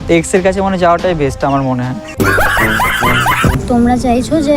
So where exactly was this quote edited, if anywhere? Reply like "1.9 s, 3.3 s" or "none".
3.6 s